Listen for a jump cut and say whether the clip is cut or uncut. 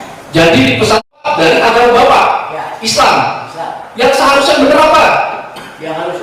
cut